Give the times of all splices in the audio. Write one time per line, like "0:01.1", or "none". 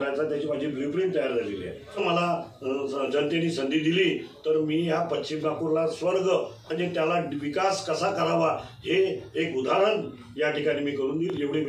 0:02.0